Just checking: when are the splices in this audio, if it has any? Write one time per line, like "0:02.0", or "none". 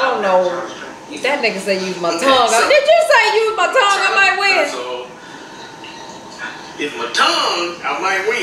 none